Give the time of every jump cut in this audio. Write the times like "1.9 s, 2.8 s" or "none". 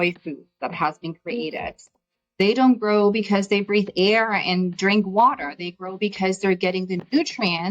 1.8 s